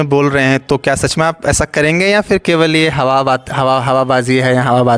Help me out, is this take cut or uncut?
uncut